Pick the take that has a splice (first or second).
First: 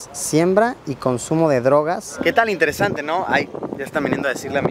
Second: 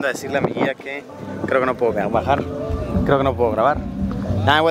first